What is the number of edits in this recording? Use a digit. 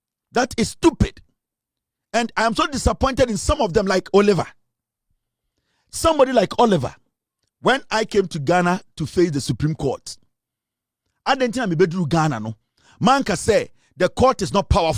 0